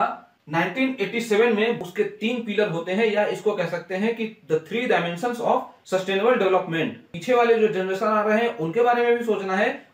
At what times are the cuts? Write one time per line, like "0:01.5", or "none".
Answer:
0:01.8
0:05.8
0:07.1